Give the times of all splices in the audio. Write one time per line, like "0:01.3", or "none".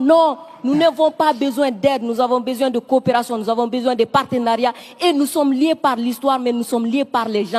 none